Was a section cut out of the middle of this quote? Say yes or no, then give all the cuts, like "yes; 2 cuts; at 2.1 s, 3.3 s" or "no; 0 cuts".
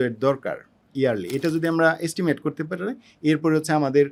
no; 0 cuts